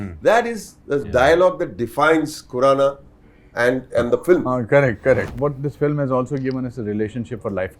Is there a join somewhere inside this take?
yes; 1 cut; at 5.3 s

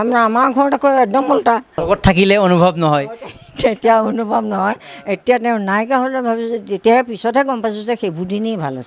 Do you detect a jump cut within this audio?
yes; 1 cut; at 1.8 s

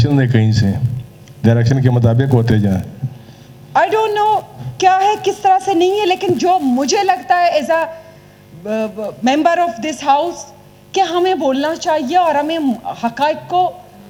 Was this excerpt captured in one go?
yes; 0 cuts

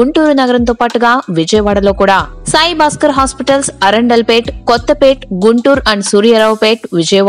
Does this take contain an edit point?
no; 0 cuts

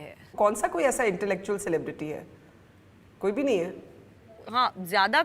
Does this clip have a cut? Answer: no; 0 cuts

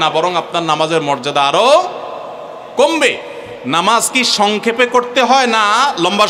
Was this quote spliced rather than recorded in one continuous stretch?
no; 0 cuts

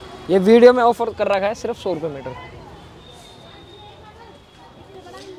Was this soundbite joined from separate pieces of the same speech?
no; 0 cuts

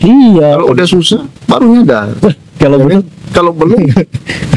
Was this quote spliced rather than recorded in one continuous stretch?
no; 0 cuts

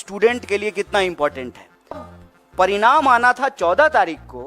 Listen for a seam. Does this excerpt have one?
yes; 1 cut; at 2.1 s

